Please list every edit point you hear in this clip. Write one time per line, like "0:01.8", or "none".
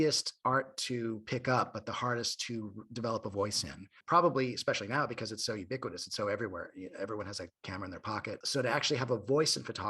0:04.0
0:08.4